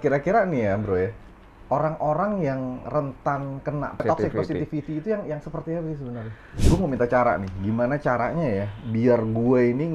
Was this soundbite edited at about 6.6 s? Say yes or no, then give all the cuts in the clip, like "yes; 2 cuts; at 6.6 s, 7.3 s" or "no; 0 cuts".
yes; 1 cut; at 6.6 s